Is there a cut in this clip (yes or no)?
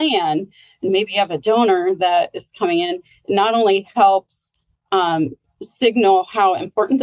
no